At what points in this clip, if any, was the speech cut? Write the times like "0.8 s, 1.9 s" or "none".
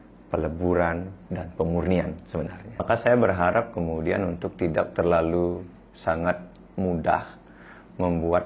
2.8 s